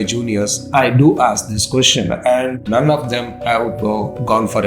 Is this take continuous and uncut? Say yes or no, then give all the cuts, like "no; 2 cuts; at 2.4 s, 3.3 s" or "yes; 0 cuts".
no; 1 cut; at 2.6 s